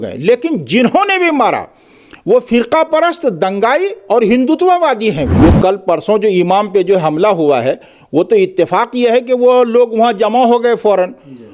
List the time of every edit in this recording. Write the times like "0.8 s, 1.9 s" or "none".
5.3 s

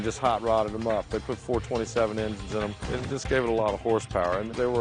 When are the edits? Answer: 2.9 s

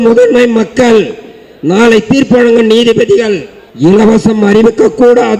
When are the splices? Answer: 3.6 s

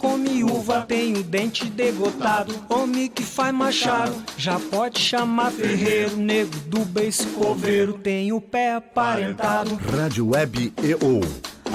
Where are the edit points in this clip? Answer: none

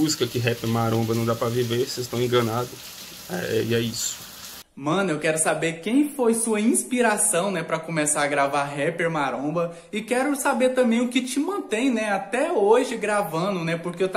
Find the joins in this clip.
none

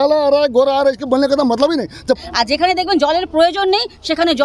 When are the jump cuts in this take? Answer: 2.2 s

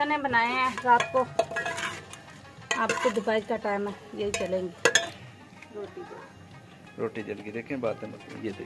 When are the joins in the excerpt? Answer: 5.2 s

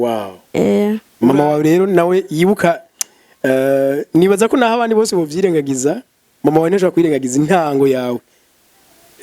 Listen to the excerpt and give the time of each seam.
1.1 s

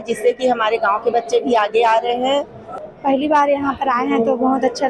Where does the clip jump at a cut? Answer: 2.8 s

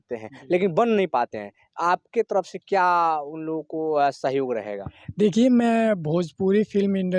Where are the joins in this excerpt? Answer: none

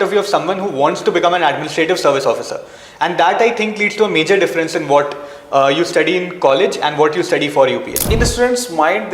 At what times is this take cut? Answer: 8.0 s

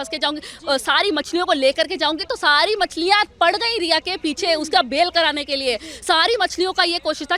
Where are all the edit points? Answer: none

